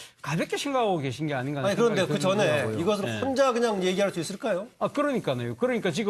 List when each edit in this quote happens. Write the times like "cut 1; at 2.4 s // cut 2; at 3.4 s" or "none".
none